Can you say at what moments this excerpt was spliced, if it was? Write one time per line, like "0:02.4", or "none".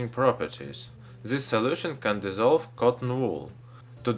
0:01.3